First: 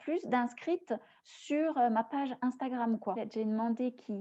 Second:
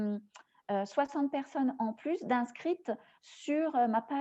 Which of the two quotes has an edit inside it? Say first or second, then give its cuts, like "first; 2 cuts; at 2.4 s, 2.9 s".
first; 1 cut; at 3.2 s